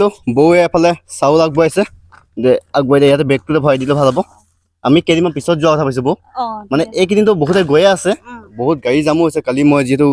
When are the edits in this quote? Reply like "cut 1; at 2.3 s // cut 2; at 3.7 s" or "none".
none